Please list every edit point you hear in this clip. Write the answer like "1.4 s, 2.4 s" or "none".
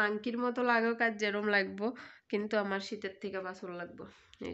none

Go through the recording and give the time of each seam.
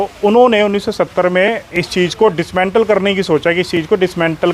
none

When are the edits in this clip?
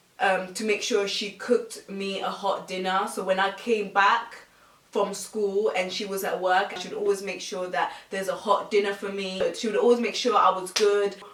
none

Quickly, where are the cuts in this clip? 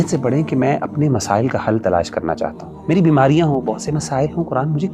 2.7 s

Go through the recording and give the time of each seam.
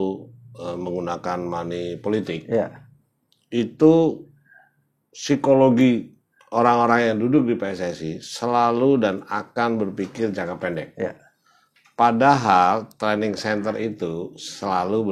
none

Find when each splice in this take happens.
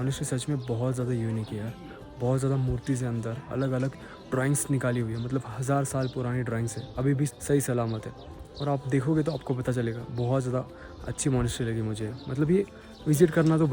none

